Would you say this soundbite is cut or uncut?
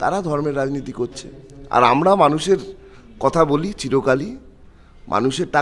uncut